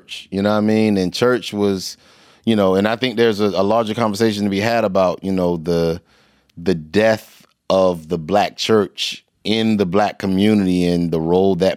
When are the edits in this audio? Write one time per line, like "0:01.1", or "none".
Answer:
none